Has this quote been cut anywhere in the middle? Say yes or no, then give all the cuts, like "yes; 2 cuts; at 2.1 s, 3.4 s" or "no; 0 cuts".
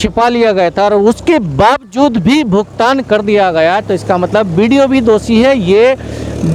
no; 0 cuts